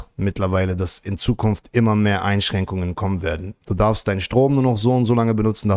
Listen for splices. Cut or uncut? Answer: uncut